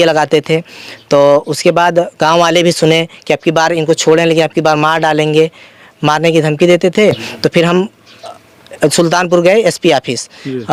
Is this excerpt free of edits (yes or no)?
yes